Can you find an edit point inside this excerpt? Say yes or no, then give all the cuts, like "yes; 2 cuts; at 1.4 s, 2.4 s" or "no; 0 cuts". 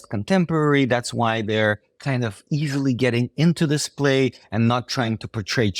no; 0 cuts